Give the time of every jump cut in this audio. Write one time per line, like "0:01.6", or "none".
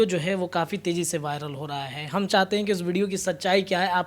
none